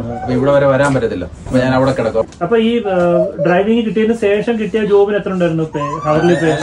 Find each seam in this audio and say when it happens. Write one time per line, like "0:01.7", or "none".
0:02.2